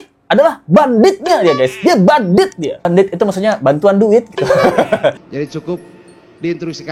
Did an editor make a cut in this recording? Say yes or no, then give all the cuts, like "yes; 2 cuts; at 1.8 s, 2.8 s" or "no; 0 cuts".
yes; 2 cuts; at 2.9 s, 5.2 s